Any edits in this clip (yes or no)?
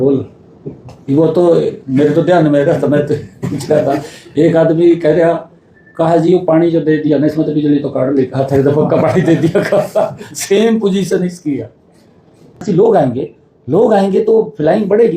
yes